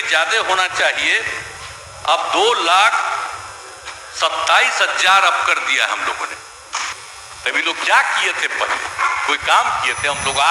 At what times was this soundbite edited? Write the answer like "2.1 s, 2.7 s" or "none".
6.9 s